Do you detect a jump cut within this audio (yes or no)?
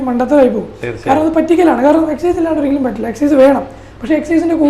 no